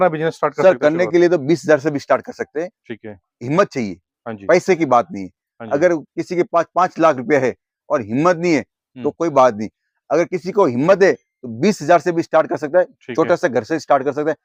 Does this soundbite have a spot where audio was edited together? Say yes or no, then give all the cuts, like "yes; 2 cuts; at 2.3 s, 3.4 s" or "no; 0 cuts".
no; 0 cuts